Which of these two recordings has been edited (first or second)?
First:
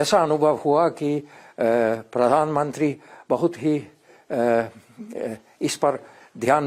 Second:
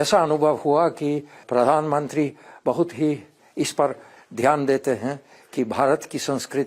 second